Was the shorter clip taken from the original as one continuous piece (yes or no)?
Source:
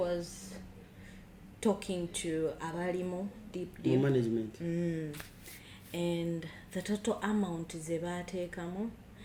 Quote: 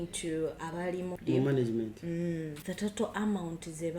no